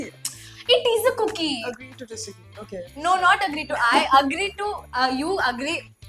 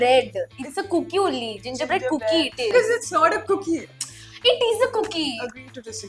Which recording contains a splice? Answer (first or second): second